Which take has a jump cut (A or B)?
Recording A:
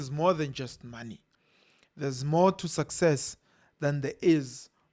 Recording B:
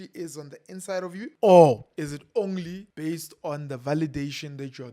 B